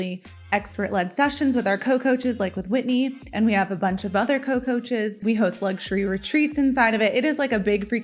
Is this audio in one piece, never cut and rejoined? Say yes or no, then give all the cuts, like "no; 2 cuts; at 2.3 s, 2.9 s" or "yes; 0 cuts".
no; 1 cut; at 5.2 s